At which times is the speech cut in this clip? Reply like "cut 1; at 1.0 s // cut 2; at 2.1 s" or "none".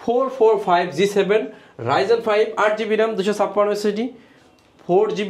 none